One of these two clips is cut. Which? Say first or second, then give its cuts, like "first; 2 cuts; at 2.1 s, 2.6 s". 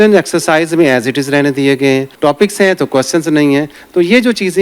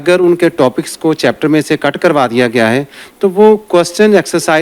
first; 1 cut; at 2.1 s